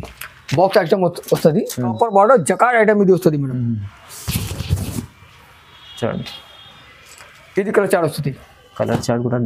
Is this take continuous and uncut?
no; 1 cut; at 1.9 s

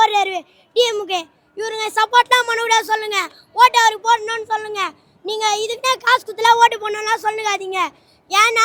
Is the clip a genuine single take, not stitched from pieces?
yes; 0 cuts

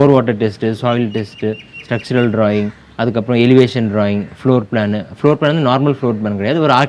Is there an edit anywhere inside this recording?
no; 0 cuts

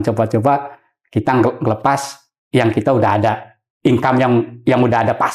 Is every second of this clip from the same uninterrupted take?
yes; 0 cuts

